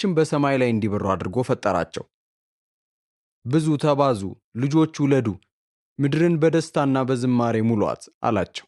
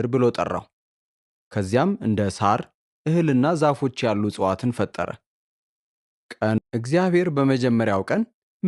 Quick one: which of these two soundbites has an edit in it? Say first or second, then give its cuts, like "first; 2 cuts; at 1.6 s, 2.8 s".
second; 1 cut; at 6.6 s